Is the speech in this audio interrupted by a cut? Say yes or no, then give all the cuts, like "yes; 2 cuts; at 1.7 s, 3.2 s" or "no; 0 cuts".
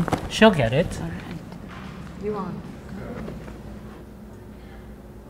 no; 0 cuts